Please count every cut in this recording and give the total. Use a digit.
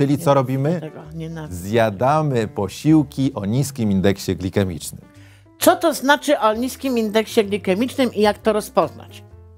0